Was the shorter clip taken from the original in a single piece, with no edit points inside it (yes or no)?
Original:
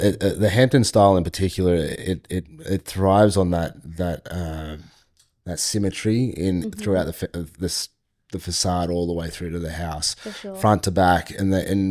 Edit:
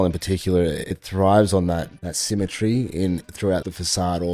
no